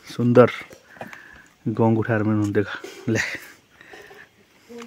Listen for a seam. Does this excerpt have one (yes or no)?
no